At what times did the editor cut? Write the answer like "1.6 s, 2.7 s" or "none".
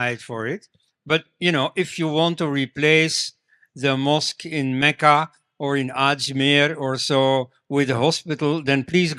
none